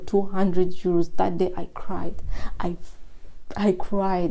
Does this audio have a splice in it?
no; 0 cuts

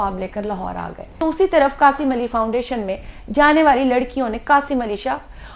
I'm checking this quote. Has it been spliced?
yes; 1 cut; at 1.2 s

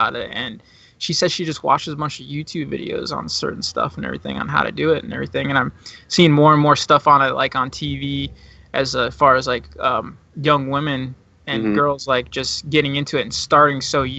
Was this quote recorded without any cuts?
yes; 0 cuts

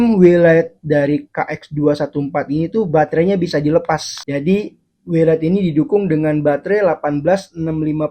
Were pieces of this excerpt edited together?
yes; 1 cut; at 4.1 s

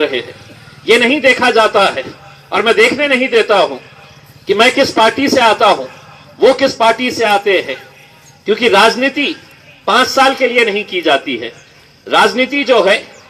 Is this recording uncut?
yes; 0 cuts

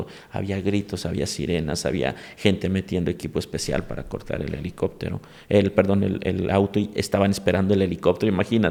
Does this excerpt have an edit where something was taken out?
no; 0 cuts

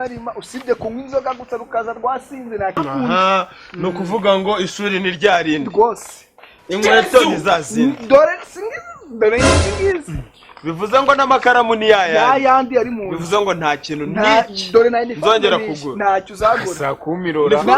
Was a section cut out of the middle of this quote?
yes; 1 cut; at 2.8 s

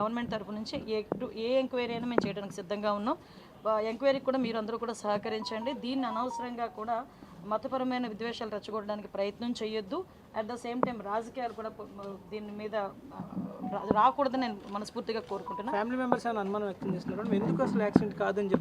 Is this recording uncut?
no; 1 cut; at 1.6 s

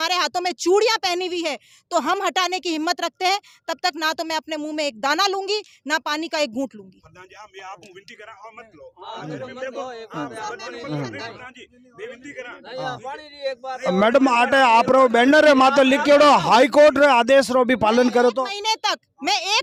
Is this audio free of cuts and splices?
yes; 0 cuts

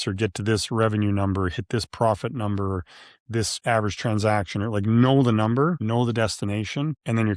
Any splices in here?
no; 0 cuts

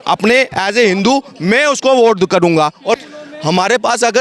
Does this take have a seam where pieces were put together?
yes; 1 cut; at 3.0 s

